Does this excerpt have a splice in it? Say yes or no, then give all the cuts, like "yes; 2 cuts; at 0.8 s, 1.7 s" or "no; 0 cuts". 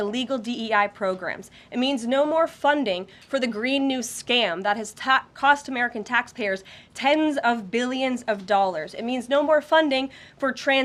no; 0 cuts